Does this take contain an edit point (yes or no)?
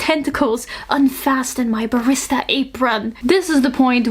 yes